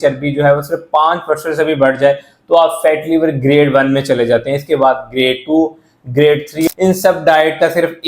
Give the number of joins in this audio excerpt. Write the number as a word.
one